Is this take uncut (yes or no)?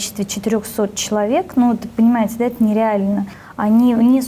no